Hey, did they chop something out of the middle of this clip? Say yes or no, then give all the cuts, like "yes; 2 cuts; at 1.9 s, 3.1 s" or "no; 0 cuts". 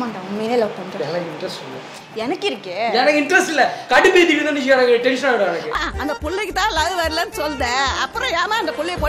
no; 0 cuts